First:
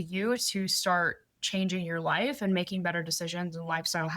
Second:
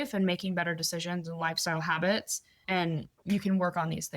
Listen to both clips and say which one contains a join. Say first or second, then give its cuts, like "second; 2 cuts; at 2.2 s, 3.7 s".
second; 1 cut; at 2.8 s